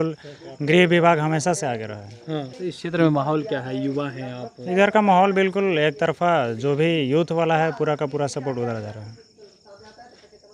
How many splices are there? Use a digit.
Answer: 1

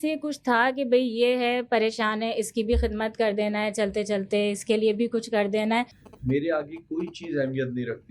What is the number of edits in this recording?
1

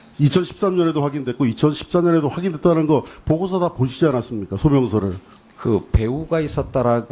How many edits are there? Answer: 0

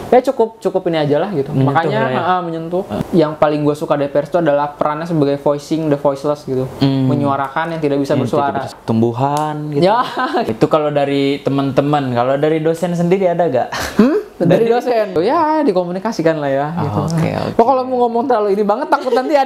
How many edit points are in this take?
4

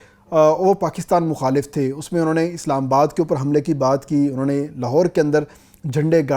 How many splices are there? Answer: 0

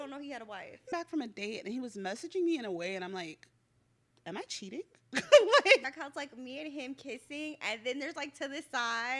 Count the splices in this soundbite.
2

